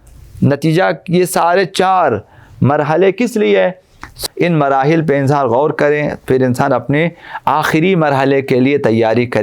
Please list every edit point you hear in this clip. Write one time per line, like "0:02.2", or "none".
0:04.1